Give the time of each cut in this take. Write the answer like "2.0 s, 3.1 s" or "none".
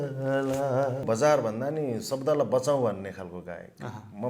1.0 s